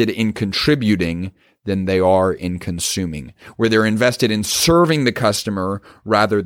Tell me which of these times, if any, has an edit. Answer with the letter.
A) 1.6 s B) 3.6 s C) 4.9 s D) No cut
D